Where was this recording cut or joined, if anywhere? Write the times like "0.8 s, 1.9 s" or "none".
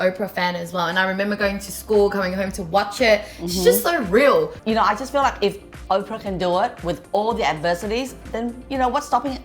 4.6 s, 8.3 s